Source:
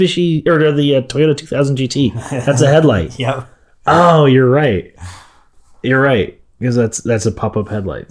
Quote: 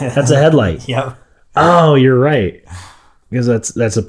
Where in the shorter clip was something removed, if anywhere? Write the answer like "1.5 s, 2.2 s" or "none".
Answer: 3.2 s